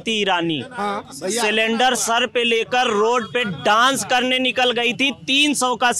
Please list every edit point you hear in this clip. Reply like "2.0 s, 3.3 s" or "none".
none